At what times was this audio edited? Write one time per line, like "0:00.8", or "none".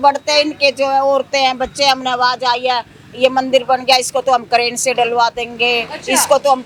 none